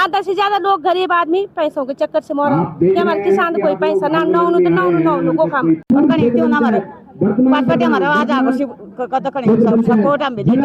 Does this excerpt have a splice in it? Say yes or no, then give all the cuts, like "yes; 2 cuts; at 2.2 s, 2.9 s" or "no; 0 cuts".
yes; 1 cut; at 5.8 s